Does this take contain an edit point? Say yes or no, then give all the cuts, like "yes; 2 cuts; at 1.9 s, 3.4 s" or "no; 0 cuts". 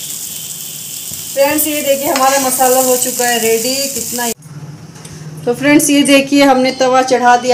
yes; 1 cut; at 4.4 s